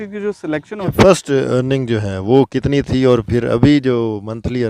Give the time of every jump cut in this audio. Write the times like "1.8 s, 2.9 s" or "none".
0.9 s